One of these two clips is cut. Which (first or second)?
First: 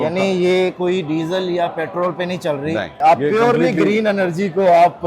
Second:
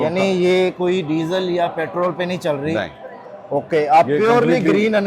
first